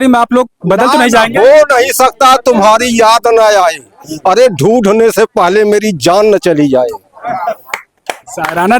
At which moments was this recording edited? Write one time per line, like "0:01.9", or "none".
none